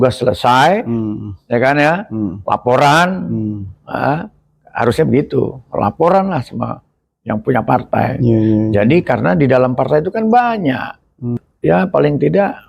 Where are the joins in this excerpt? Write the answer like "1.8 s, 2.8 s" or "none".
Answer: 11.4 s

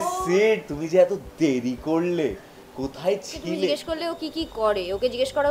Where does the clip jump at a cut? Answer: 3.4 s

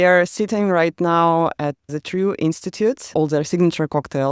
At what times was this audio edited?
1.9 s, 3.1 s

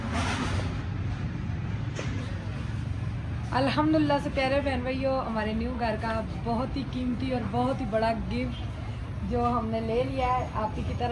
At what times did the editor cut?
none

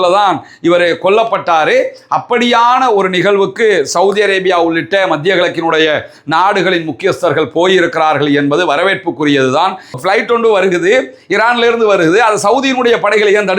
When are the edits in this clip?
10.0 s

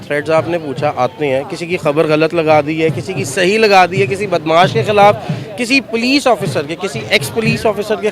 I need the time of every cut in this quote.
none

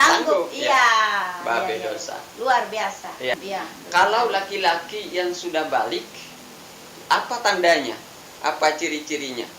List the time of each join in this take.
3.3 s

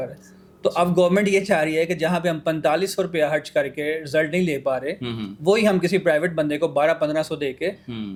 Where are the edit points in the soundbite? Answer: none

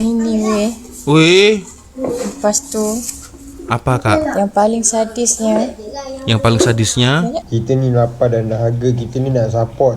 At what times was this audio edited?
7.4 s

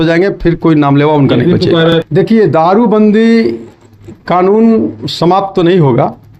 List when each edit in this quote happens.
1.9 s

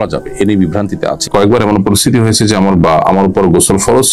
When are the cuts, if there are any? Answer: 1.2 s

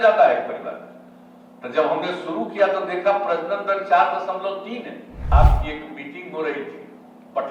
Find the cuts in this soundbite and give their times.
5.3 s

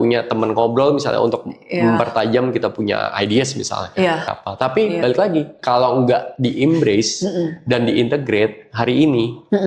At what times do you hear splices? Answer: 4.3 s

